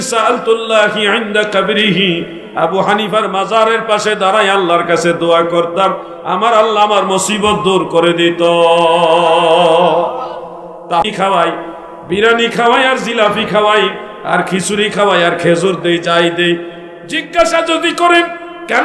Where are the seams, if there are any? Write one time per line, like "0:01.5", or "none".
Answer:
0:11.0